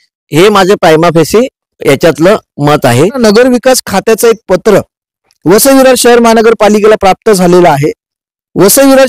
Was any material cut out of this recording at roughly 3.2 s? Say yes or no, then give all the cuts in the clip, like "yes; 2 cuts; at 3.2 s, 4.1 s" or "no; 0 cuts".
yes; 1 cut; at 3.2 s